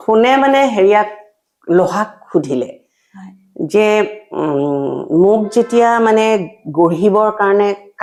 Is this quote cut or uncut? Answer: uncut